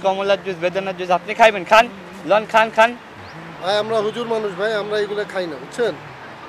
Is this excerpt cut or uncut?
uncut